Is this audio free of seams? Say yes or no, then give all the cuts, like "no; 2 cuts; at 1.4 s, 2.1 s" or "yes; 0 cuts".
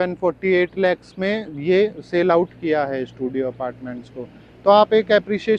yes; 0 cuts